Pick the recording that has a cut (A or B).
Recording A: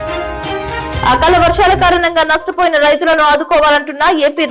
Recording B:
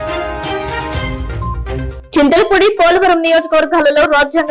A